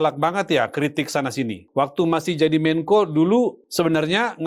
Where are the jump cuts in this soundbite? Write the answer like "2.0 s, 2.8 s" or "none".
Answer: 1.6 s, 3.6 s